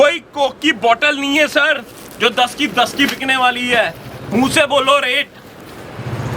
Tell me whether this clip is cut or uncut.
uncut